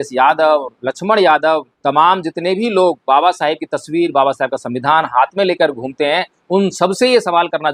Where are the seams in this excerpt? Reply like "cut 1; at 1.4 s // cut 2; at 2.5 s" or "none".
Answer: cut 1; at 1.7 s